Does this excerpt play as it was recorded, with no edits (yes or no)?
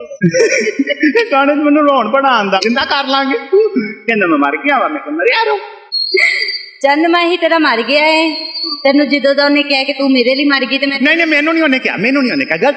no